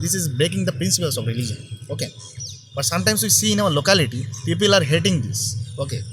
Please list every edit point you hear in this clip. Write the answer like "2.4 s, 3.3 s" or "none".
none